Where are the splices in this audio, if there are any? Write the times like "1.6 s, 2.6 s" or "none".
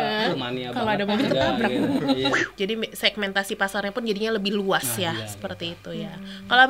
2.5 s